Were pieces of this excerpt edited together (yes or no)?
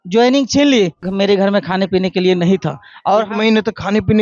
yes